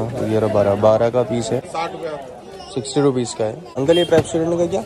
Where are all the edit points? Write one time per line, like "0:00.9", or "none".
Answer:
0:01.7
0:03.7